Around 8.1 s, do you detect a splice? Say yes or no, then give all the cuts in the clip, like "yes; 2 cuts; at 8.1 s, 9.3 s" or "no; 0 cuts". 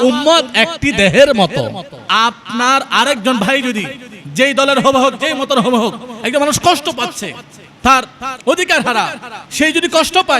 no; 1 cut; at 2.0 s